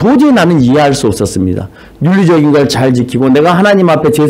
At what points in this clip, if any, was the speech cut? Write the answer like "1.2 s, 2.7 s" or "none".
none